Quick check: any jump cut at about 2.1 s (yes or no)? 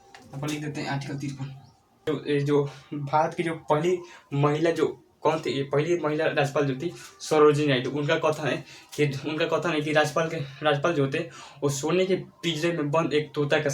yes